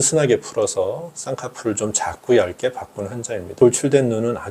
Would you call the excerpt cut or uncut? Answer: cut